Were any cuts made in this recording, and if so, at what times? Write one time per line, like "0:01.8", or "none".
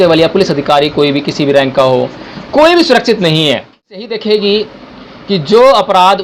0:04.1